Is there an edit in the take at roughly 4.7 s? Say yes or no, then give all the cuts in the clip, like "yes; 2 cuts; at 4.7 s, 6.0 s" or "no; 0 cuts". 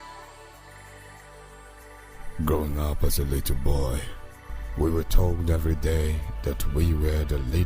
no; 1 cut; at 1.1 s